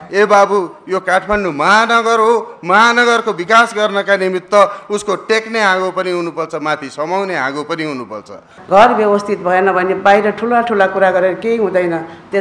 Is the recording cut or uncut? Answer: cut